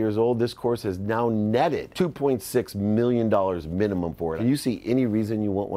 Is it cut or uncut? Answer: cut